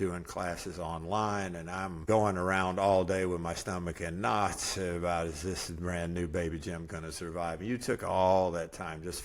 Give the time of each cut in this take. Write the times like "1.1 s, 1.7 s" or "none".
2.0 s